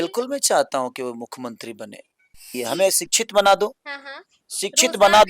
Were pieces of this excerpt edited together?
yes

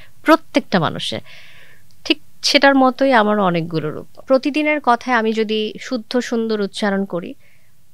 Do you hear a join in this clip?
yes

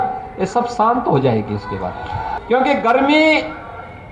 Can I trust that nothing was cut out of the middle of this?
no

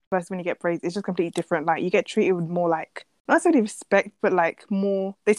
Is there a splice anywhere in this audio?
no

